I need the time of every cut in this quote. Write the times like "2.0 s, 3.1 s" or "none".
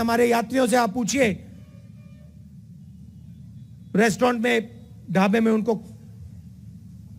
none